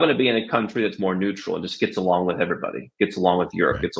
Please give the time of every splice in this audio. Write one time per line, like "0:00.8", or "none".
none

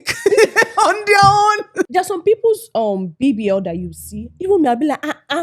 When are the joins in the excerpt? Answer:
0:01.9

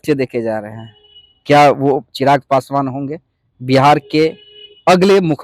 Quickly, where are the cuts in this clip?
none

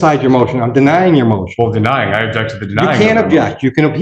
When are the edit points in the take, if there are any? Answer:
none

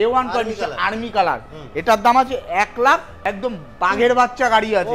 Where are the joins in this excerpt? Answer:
0:03.2

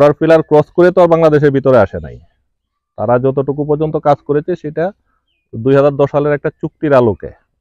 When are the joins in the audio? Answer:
none

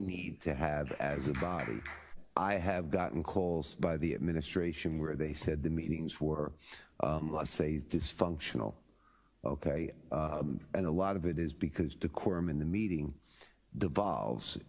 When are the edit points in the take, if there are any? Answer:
0:02.2

